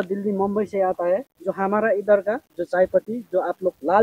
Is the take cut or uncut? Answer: cut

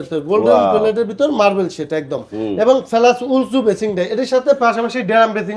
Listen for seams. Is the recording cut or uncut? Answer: uncut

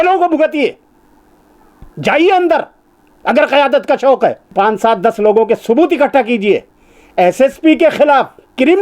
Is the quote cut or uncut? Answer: cut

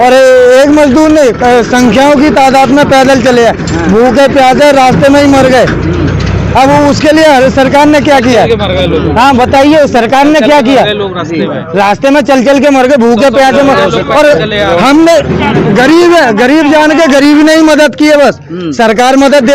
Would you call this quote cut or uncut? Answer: uncut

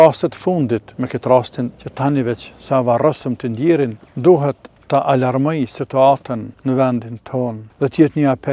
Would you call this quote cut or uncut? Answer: cut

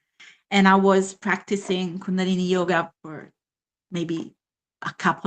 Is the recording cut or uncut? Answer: cut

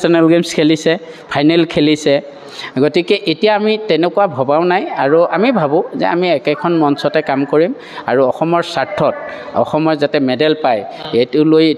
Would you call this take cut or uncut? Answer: uncut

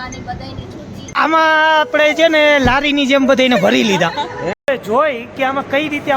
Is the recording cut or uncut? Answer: cut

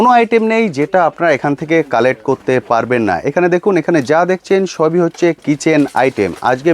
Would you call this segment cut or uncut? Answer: uncut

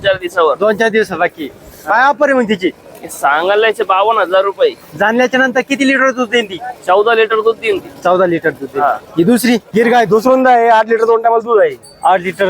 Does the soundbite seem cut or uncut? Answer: cut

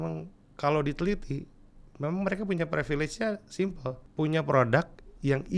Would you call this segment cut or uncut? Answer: cut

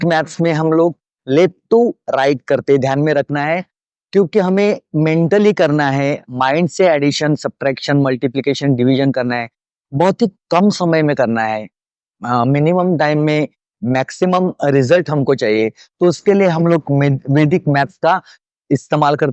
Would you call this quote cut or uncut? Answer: uncut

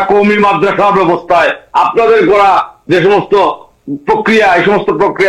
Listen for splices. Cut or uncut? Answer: uncut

